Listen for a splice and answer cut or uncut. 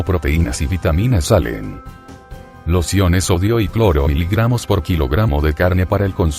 uncut